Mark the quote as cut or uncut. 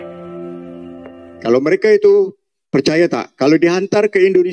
cut